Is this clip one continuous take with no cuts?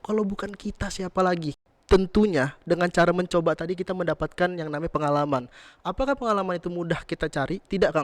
no; 1 cut; at 1.6 s

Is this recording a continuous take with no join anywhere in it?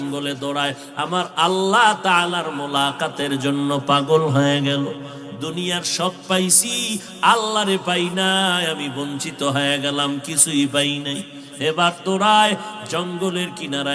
yes; 0 cuts

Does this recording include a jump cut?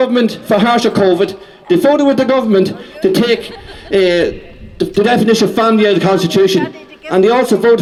no; 0 cuts

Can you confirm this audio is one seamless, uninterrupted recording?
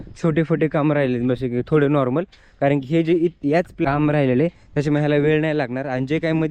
no; 1 cut; at 3.7 s

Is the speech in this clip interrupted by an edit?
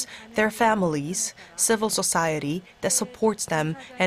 no; 0 cuts

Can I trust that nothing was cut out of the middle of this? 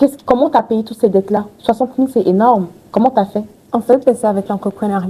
yes; 0 cuts

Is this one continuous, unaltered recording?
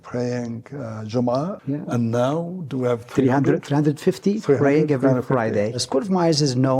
no; 2 cuts; at 1.6 s, 5.8 s

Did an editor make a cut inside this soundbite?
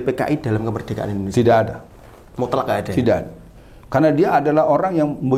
no; 0 cuts

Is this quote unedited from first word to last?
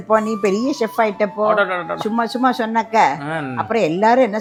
yes; 0 cuts

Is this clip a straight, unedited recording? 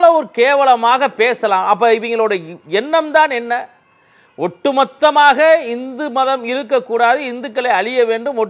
yes; 0 cuts

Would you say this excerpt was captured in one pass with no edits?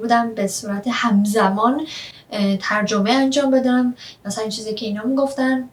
yes; 0 cuts

